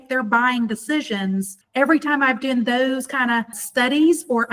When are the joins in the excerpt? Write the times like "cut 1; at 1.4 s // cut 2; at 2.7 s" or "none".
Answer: cut 1; at 1.5 s // cut 2; at 3.6 s